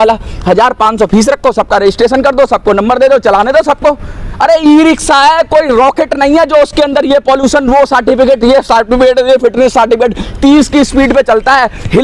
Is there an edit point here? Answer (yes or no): no